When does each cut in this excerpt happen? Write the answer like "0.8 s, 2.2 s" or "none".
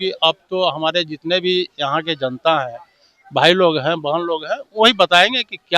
none